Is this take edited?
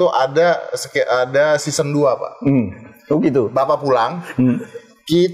no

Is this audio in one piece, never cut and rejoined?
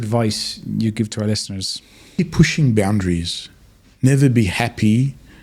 yes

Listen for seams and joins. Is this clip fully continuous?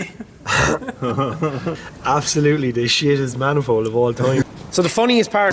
no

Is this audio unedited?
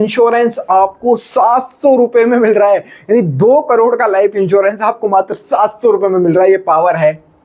yes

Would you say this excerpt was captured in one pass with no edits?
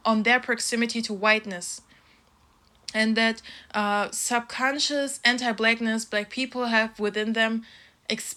yes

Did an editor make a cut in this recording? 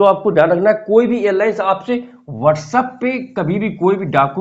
no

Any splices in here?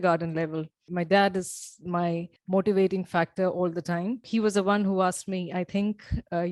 no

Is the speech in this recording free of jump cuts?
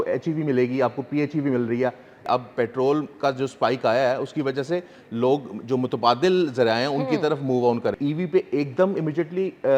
no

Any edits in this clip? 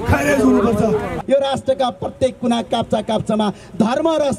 yes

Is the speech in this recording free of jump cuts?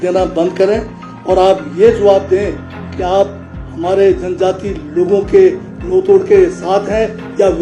yes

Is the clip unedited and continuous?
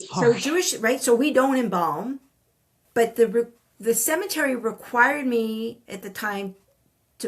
no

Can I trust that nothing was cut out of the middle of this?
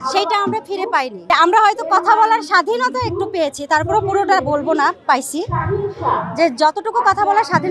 no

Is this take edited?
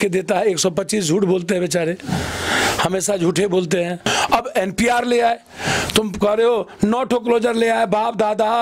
yes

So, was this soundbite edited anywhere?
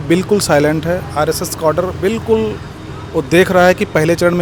no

